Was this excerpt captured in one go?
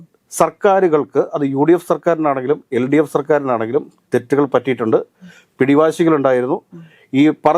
yes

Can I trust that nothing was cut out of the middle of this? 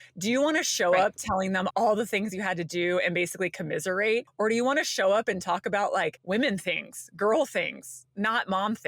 no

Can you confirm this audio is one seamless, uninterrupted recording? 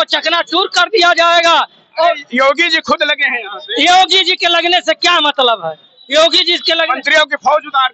yes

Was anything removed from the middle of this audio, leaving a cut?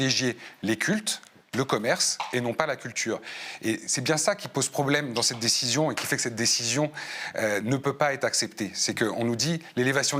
no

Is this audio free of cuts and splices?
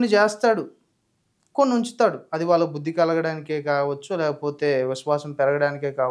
yes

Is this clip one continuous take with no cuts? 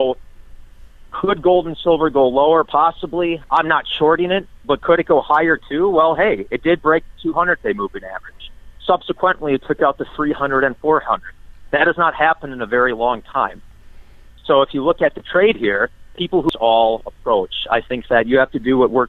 no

